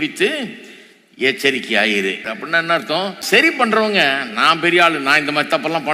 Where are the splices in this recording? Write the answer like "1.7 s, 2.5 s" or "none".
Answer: 2.3 s, 3.4 s

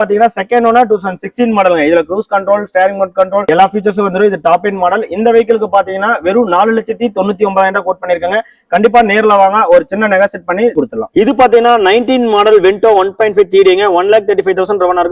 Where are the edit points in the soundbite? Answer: 10.8 s

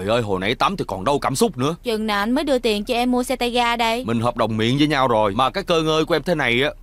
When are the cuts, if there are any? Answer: 1.8 s, 4.0 s, 5.3 s

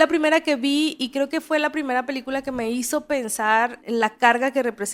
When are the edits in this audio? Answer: 3.8 s

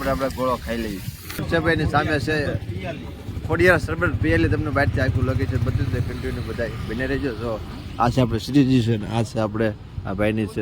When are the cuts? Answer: 1.4 s

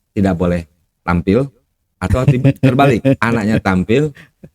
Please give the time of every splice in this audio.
0.9 s

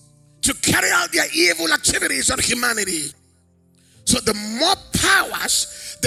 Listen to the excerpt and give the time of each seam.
none

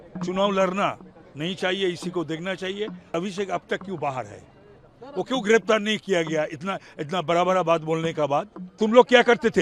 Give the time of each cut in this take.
3.1 s, 8.8 s

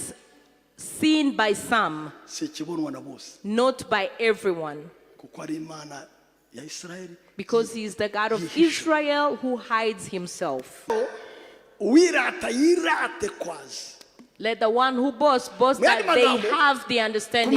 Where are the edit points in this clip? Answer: 10.9 s

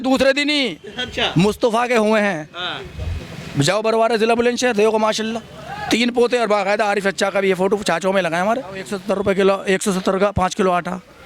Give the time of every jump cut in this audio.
8.9 s

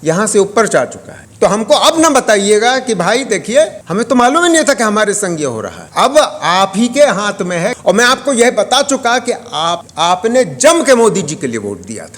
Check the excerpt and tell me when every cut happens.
1.2 s, 7.7 s

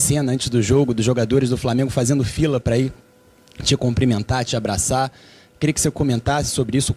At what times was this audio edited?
none

